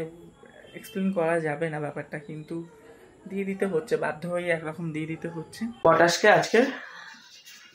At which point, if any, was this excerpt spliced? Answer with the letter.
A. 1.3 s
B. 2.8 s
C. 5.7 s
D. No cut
C